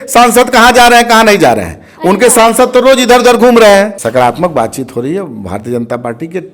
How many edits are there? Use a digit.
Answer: 1